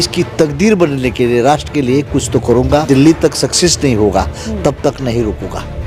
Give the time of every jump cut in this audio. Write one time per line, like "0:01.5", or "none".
0:02.8